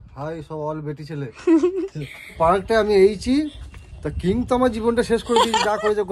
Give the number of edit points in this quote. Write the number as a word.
one